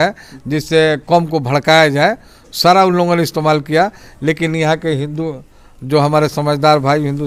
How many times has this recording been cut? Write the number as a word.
zero